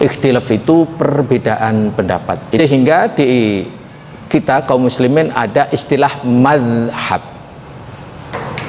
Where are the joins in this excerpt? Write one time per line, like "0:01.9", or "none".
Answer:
0:02.6